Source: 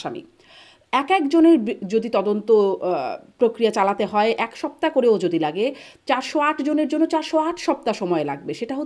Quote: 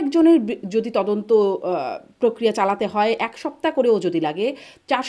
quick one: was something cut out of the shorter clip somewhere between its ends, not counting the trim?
no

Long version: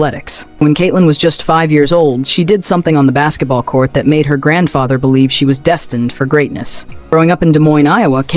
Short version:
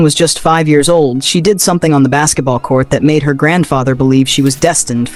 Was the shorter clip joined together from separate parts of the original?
no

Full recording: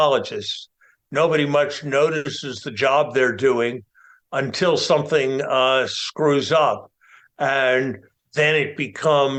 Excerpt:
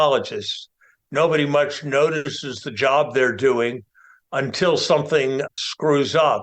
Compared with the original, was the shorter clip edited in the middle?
yes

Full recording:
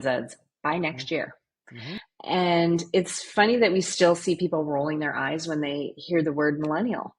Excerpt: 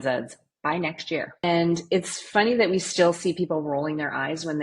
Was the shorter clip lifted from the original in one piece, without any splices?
no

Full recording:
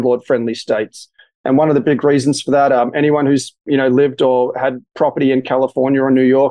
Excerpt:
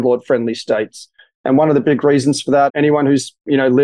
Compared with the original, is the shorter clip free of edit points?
no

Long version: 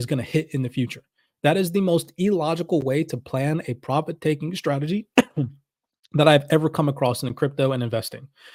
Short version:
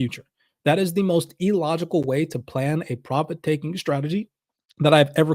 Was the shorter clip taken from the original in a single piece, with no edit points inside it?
no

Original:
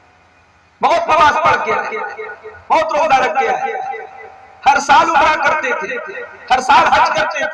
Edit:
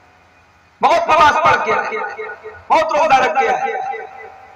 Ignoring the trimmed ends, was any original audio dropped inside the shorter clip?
no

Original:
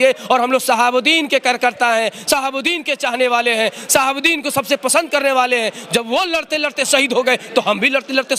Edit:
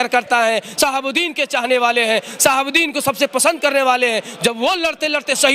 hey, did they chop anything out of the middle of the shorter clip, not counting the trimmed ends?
no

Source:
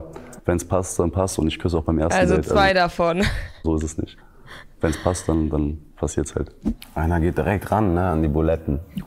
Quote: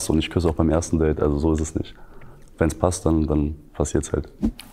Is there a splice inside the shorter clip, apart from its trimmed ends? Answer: yes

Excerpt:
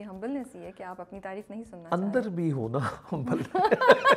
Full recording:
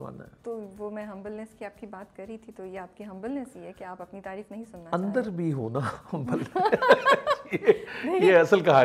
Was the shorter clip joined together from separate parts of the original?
no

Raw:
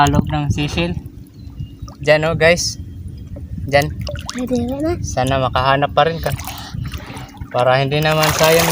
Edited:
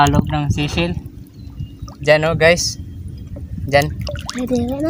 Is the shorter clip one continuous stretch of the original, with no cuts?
yes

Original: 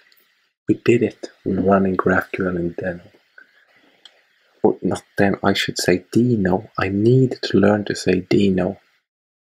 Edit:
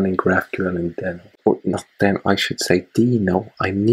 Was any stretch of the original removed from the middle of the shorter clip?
yes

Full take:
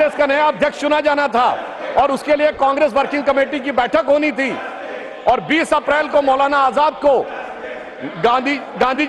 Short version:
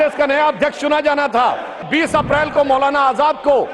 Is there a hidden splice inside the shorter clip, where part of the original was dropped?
yes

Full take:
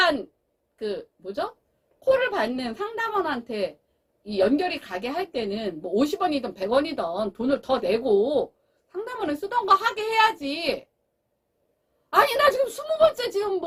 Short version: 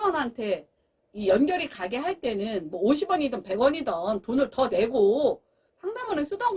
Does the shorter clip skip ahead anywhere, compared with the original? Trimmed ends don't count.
no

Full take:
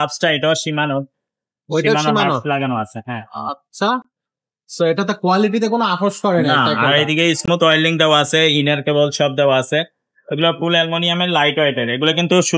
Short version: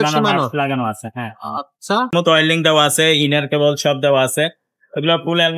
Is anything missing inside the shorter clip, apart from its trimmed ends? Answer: yes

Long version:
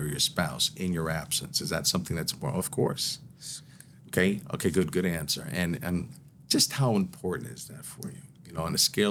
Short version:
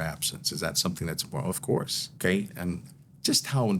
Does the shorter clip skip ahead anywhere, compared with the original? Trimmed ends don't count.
yes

